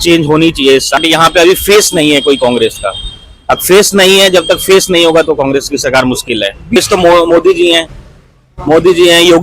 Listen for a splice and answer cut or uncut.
cut